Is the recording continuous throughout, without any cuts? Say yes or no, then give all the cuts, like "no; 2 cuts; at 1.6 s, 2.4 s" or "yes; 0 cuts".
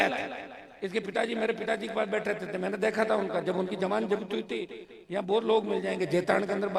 yes; 0 cuts